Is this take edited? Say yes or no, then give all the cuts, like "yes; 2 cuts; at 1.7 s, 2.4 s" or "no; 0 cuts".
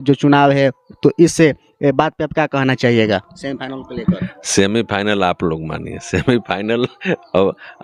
no; 0 cuts